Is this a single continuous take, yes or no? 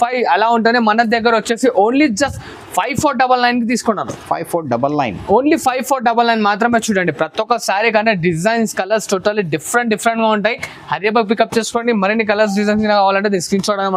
yes